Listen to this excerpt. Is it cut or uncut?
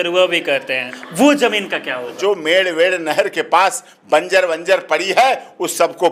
cut